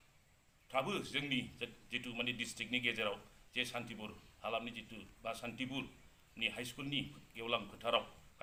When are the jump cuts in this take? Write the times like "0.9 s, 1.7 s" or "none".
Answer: none